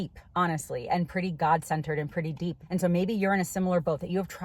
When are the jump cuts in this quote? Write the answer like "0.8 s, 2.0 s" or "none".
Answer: 2.6 s